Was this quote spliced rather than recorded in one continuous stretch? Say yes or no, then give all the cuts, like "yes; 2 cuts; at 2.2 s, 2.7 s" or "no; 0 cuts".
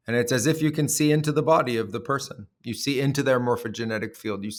no; 0 cuts